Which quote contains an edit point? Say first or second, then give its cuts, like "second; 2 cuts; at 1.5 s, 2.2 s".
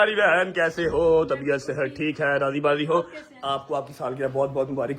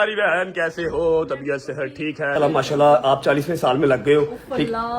second; 1 cut; at 2.3 s